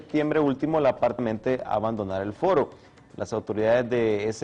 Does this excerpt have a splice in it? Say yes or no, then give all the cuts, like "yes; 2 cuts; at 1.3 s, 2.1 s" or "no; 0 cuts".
no; 0 cuts